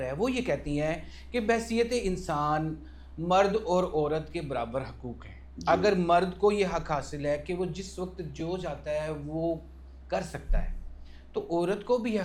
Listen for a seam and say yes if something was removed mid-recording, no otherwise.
no